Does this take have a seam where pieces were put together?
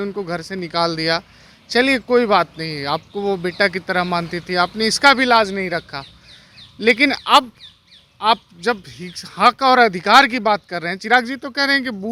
no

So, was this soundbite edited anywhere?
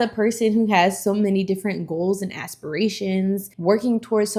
no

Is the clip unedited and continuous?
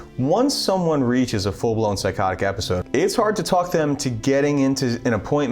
no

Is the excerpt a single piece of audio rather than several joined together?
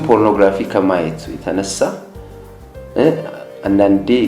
yes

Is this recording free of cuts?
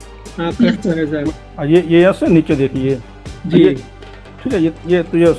no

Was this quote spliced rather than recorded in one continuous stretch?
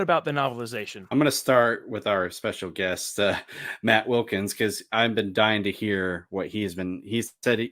yes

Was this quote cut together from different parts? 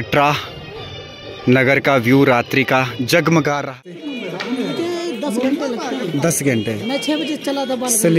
yes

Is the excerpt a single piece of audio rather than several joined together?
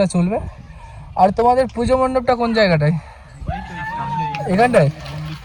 yes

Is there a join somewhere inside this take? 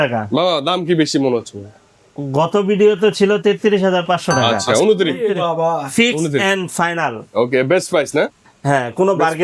yes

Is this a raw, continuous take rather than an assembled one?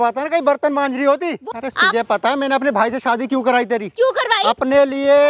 no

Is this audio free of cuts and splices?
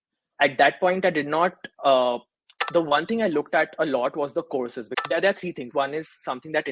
no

